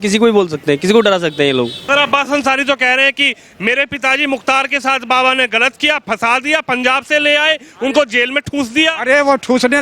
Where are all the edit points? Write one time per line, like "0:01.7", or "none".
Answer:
0:01.8